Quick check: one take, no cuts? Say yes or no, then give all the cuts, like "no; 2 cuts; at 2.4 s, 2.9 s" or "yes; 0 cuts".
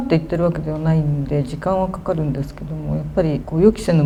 yes; 0 cuts